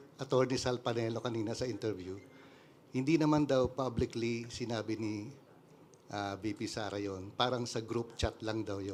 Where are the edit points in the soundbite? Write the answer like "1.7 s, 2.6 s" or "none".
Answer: none